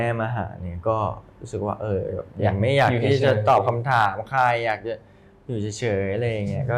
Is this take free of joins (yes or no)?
yes